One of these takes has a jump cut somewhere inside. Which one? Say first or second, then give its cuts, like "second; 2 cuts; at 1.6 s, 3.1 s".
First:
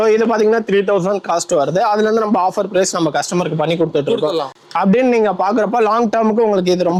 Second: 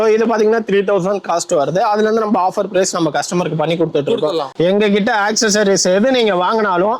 second; 1 cut; at 4.5 s